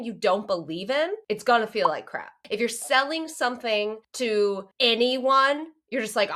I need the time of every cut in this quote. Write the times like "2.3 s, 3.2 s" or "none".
1.2 s, 2.4 s, 4.0 s, 4.7 s

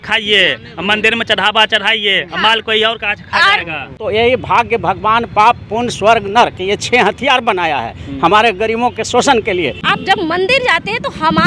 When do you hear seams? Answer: 4.0 s, 9.9 s

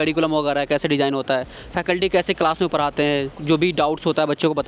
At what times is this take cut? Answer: 3.3 s

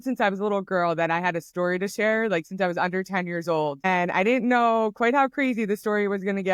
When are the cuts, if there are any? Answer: none

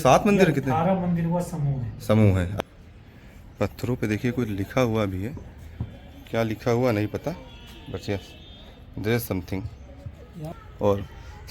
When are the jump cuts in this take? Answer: 2.5 s, 10.4 s

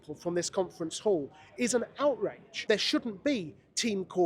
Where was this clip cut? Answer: 2.5 s

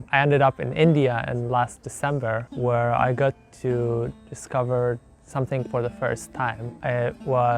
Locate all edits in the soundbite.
2.5 s, 6.7 s

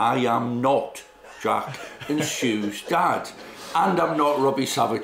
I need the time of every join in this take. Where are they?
none

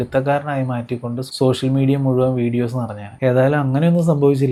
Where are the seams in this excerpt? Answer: none

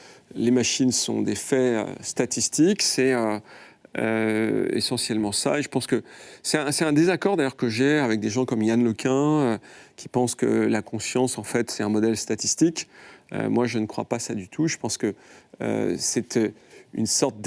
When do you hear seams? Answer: none

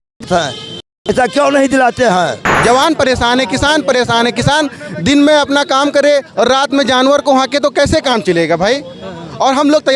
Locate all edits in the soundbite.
2.5 s

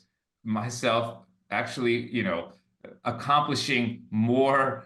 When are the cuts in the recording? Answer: none

